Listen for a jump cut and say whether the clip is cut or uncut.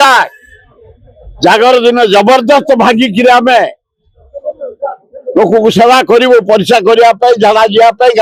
uncut